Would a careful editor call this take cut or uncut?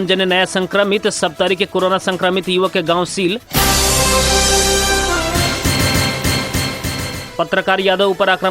cut